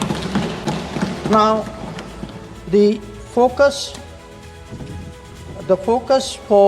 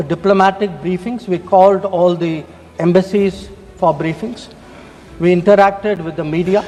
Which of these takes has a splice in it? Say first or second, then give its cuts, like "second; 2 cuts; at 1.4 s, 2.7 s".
first; 1 cut; at 1.0 s